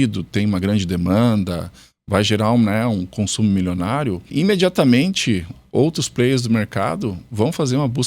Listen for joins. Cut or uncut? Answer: cut